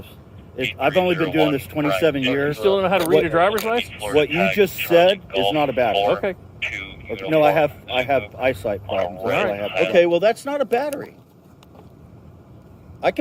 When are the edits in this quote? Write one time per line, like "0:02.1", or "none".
0:09.7